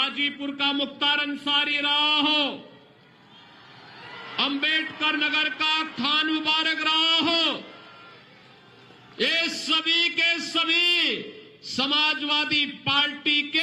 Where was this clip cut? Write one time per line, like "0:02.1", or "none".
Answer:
none